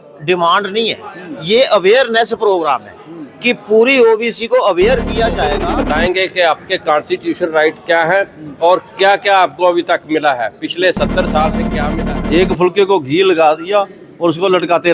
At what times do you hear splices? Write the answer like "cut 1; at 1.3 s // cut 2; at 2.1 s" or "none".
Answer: cut 1; at 5.5 s // cut 2; at 11.7 s